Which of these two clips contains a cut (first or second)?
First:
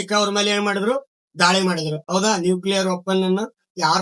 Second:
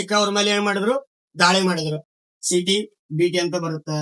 second